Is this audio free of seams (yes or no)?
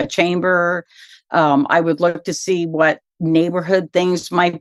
yes